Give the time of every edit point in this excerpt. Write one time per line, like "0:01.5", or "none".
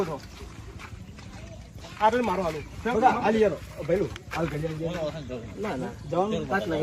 none